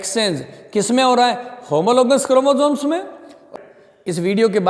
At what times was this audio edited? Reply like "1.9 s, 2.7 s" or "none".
3.4 s